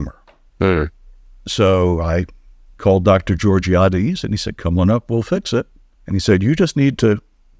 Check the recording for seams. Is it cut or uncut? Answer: uncut